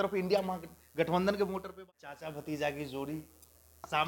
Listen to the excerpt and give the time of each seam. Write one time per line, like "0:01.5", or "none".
0:01.8